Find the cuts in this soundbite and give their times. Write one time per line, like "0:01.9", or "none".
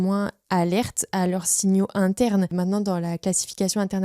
0:02.5